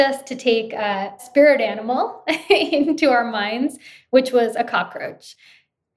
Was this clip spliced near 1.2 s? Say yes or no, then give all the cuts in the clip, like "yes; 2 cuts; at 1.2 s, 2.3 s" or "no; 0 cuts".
yes; 1 cut; at 1.2 s